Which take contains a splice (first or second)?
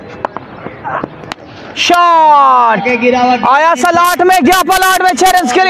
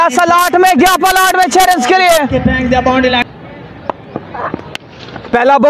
second